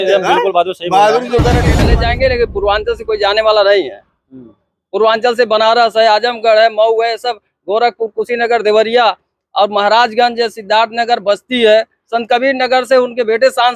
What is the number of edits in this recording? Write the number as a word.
one